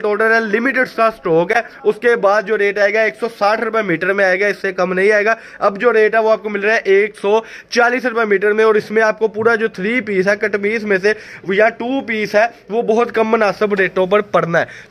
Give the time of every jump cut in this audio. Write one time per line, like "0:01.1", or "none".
none

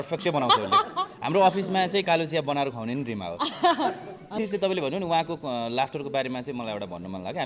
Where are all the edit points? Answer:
0:04.4

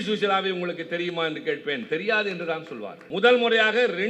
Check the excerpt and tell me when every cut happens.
0:02.9

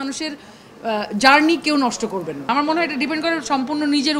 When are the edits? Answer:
0:02.4

